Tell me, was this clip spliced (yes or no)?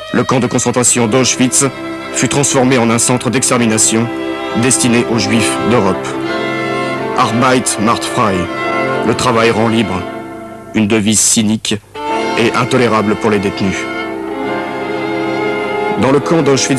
no